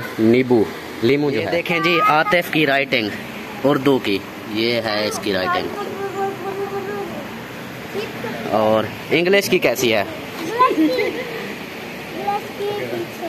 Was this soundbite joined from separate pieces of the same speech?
yes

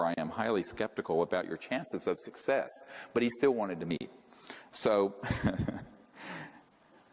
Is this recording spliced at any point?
yes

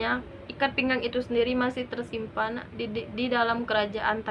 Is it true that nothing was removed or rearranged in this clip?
yes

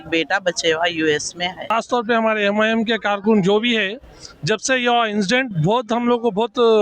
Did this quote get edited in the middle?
yes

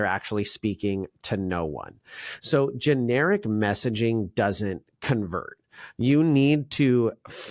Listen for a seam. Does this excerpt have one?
no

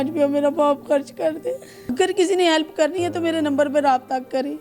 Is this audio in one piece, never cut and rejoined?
no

